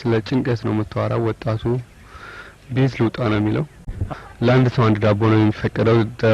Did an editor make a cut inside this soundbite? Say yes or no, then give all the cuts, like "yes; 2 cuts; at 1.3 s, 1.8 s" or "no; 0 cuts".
yes; 1 cut; at 3.8 s